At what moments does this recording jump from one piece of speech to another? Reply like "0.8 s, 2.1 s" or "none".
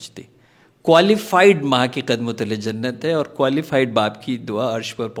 none